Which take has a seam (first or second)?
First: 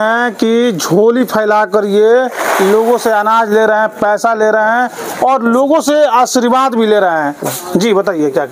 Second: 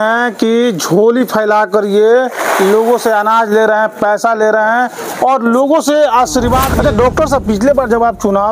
second